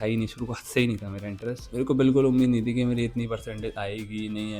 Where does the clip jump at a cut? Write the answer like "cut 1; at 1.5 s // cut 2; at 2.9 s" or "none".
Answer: cut 1; at 1.7 s

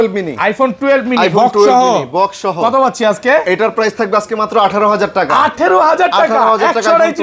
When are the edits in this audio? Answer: none

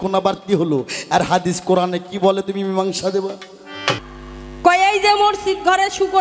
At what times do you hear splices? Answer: cut 1; at 4.0 s

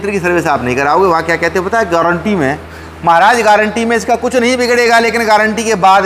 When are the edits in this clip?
none

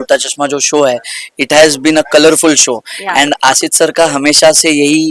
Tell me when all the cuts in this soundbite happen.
none

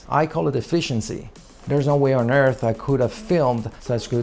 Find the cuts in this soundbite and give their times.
cut 1; at 1.3 s

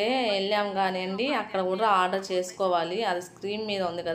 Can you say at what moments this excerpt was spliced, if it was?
none

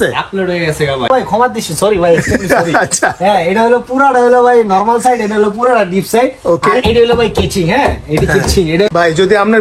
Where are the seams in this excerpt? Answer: cut 1; at 1.1 s // cut 2; at 8.9 s

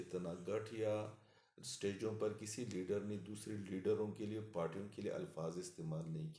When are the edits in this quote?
none

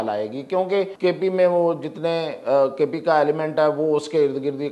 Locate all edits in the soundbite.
cut 1; at 0.9 s

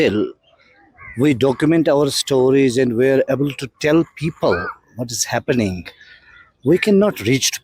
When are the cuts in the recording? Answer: none

